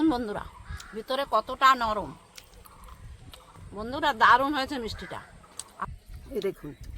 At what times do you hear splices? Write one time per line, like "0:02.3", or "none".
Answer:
0:03.5
0:05.8